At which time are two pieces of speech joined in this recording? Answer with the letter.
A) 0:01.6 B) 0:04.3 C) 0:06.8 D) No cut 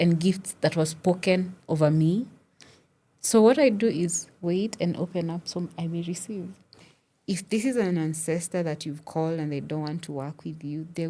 C